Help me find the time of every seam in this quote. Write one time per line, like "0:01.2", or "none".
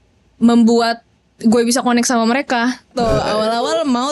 0:02.9